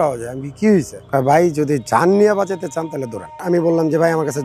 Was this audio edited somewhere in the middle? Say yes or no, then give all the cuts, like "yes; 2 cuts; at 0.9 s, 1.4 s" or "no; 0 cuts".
yes; 2 cuts; at 1.0 s, 3.4 s